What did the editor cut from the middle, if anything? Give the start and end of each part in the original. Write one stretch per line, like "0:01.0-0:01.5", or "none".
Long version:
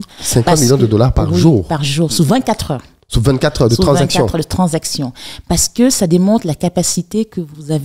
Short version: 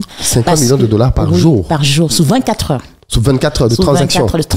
none